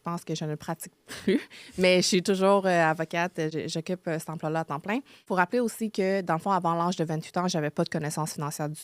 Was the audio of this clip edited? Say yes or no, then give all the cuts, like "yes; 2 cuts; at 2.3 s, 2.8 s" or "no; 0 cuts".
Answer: yes; 2 cuts; at 3.5 s, 5.3 s